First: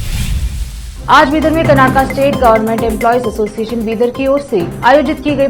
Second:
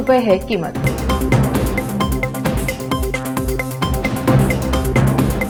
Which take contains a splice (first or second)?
first